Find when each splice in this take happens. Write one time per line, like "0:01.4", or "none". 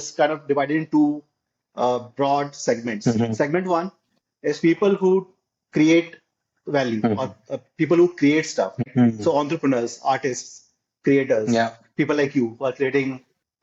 none